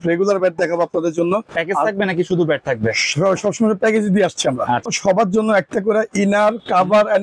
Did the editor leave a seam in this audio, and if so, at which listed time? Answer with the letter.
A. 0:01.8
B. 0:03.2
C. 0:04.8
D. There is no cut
C